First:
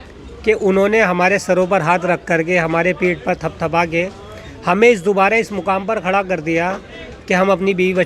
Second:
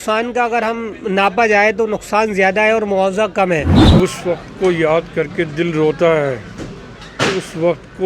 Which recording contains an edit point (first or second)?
second